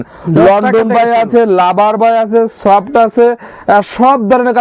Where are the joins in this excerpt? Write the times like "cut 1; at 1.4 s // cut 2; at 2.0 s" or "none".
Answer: none

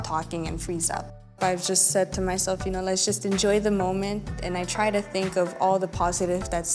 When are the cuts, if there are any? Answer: cut 1; at 1.4 s

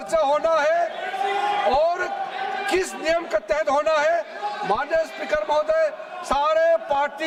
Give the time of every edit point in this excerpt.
none

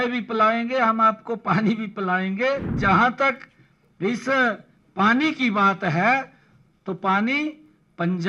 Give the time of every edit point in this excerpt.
cut 1; at 2.8 s

